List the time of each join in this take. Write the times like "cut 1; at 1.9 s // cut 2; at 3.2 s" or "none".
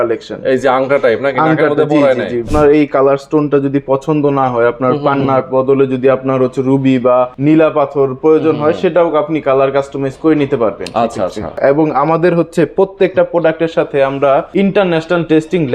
cut 1; at 2.5 s // cut 2; at 7.3 s // cut 3; at 11.5 s // cut 4; at 14.5 s